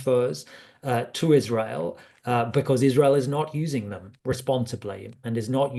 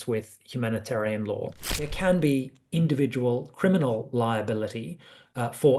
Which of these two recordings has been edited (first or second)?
second